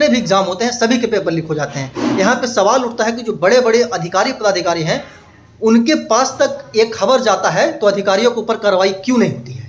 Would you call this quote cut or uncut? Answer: uncut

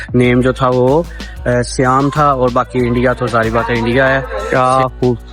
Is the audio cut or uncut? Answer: cut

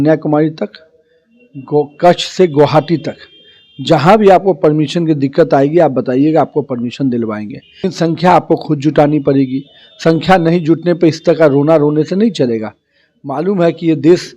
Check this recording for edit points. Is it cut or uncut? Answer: cut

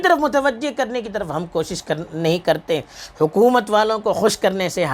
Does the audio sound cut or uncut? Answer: uncut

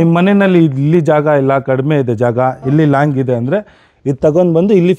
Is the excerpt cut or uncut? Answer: uncut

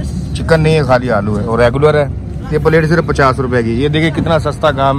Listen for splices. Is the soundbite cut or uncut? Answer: uncut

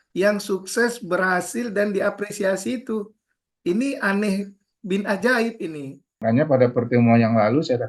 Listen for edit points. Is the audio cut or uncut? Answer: cut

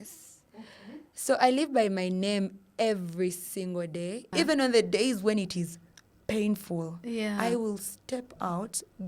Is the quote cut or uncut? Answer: cut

